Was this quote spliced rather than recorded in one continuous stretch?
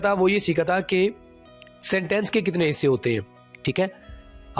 no; 0 cuts

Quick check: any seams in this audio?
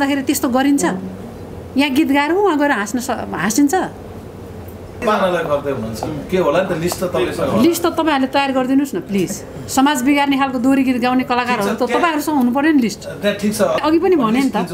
yes; 2 cuts; at 5.0 s, 13.8 s

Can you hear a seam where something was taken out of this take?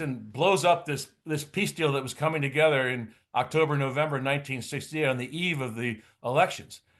no; 0 cuts

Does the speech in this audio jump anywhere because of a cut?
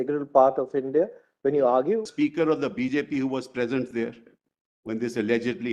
yes; 1 cut; at 2.1 s

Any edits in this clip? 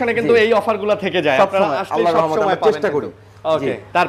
no; 0 cuts

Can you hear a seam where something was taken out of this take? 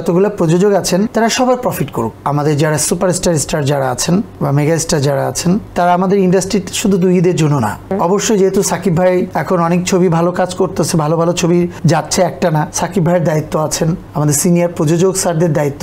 yes; 9 cuts; at 1.1 s, 2.2 s, 4.3 s, 5.7 s, 7.9 s, 9.3 s, 11.7 s, 12.7 s, 14.1 s

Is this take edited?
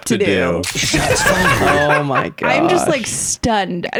no; 0 cuts

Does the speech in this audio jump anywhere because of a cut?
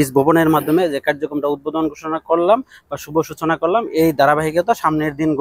no; 0 cuts

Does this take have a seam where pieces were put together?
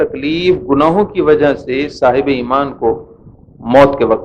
no; 0 cuts

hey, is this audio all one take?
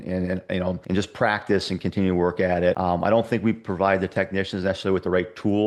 no; 2 cuts; at 0.8 s, 2.8 s

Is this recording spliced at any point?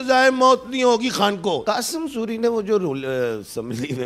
yes; 1 cut; at 1.6 s

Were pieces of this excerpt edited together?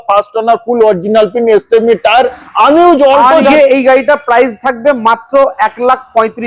yes; 1 cut; at 3.5 s

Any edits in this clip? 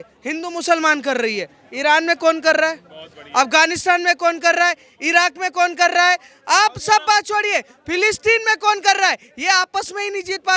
no; 0 cuts

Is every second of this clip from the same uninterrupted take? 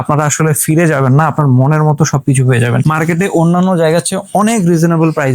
no; 1 cut; at 2.8 s

